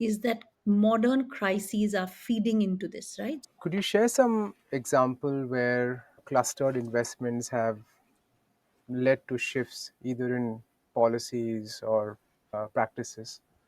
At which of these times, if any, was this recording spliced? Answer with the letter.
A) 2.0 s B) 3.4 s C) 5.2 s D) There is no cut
B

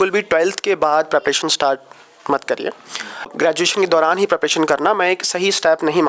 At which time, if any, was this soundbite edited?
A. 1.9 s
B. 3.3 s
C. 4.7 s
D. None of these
B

